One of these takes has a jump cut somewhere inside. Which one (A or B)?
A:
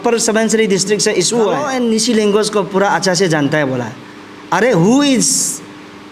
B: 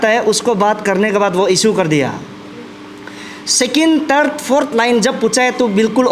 A